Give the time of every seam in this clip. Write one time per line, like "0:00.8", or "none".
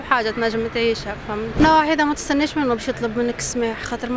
0:01.6